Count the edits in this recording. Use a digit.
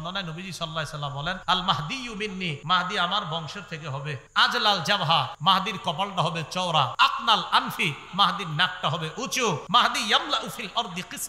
6